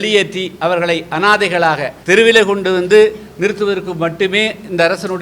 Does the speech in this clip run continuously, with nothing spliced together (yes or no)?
no